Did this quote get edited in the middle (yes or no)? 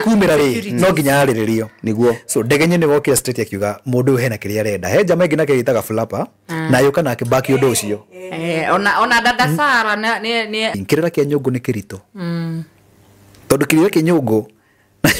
yes